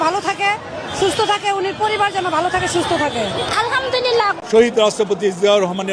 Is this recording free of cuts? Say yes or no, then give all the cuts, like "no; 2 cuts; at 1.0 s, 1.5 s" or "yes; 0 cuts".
no; 1 cut; at 4.4 s